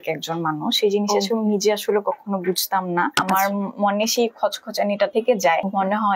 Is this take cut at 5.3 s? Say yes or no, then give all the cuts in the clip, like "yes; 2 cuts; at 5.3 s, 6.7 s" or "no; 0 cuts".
yes; 2 cuts; at 3.2 s, 5.3 s